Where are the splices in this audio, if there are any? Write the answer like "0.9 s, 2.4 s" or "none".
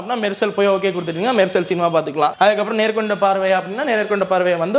none

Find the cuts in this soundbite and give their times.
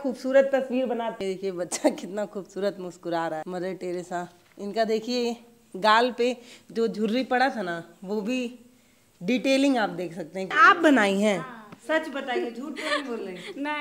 1.2 s, 3.4 s, 4.4 s, 10.5 s

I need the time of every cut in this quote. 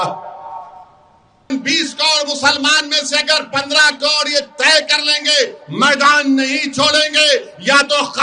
1.5 s

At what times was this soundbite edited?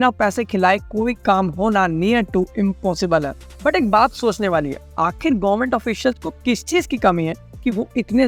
none

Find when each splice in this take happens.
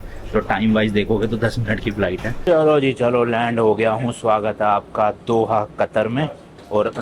2.4 s

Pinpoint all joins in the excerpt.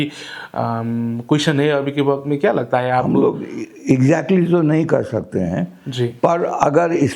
none

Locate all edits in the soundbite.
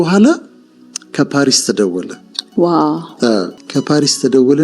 3.6 s

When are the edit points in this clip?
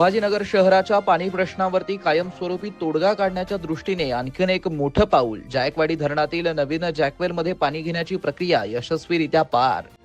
none

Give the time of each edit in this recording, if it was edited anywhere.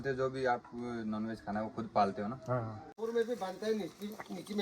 2.9 s

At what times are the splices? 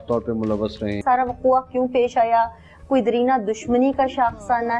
1.0 s

